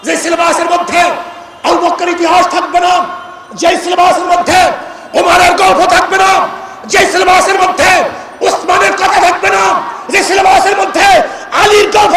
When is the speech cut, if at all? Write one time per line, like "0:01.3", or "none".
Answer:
none